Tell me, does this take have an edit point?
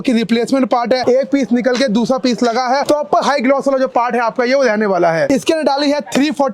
no; 0 cuts

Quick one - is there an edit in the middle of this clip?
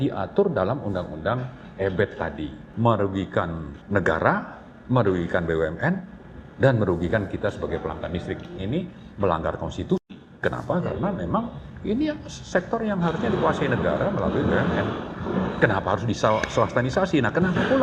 yes; 3 cuts; at 2.6 s, 3.7 s, 8.6 s

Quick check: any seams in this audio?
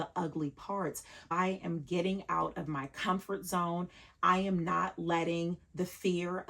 yes; 1 cut; at 1.3 s

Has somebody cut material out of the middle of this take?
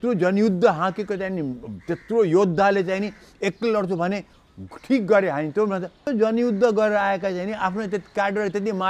yes; 1 cut; at 6.0 s

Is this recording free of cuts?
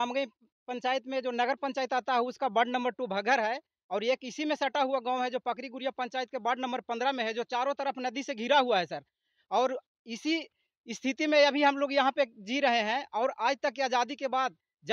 yes; 0 cuts

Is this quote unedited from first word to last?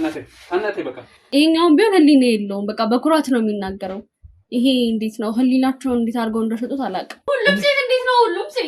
no; 2 cuts; at 1.1 s, 7.1 s

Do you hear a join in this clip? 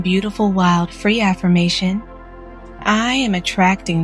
no; 0 cuts

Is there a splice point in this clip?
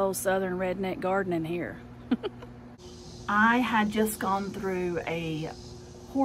yes; 1 cut; at 2.8 s

